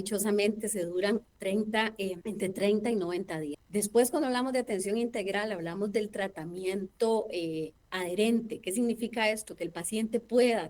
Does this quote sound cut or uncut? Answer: cut